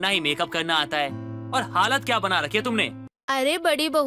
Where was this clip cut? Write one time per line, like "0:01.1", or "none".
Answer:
0:03.1

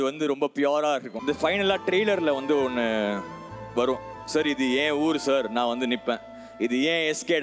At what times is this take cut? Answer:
0:01.1

